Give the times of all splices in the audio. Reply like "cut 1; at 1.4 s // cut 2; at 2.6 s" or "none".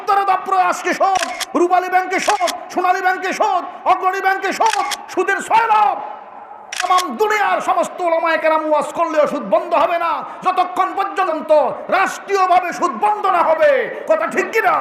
cut 1; at 6.8 s // cut 2; at 11.3 s